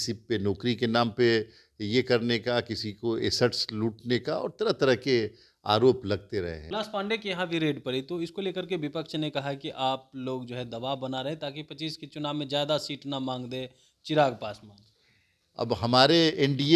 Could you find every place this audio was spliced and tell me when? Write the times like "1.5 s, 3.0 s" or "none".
6.6 s

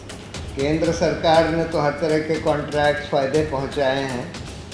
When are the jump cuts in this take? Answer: none

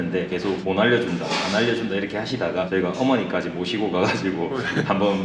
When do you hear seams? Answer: none

